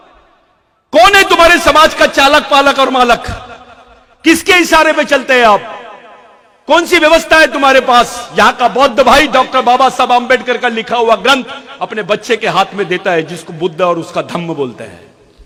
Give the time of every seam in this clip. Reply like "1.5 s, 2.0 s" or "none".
none

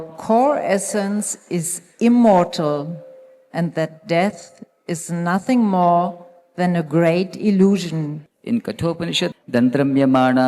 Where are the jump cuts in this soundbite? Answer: 8.2 s, 9.3 s

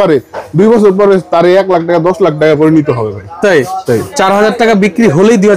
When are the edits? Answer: 4.1 s

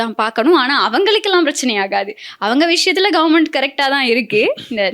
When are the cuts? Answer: none

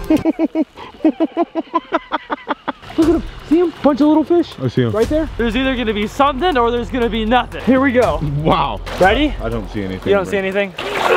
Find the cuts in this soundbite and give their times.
2.8 s, 5.3 s

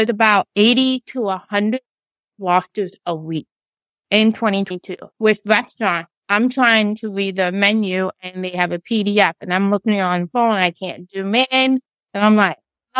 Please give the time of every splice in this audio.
5.1 s

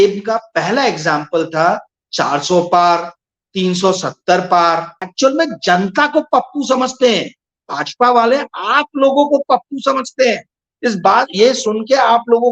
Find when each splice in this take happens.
5.0 s

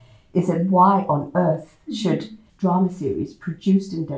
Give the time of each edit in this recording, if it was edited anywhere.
2.4 s

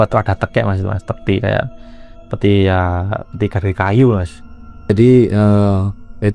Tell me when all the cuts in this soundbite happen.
4.8 s

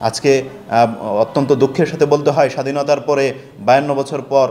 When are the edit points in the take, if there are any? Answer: none

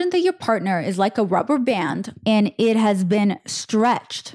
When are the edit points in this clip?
2.1 s

